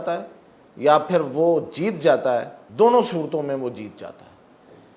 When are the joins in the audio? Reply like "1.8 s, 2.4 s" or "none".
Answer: 2.6 s